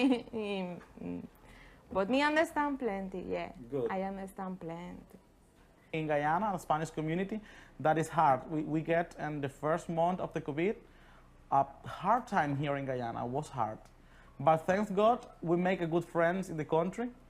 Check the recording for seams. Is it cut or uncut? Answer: cut